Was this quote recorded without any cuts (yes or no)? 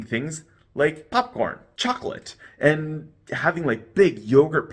no